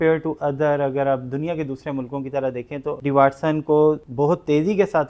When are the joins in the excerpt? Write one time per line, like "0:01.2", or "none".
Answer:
0:03.0
0:04.1